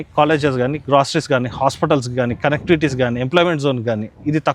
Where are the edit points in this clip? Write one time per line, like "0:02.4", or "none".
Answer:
none